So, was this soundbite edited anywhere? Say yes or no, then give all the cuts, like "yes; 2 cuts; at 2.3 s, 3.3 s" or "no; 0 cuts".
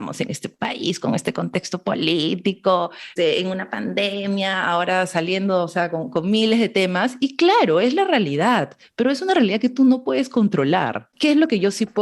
yes; 2 cuts; at 3.1 s, 11.0 s